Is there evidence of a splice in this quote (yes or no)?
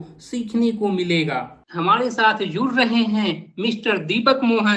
yes